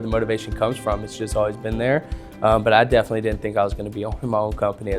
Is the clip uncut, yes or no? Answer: yes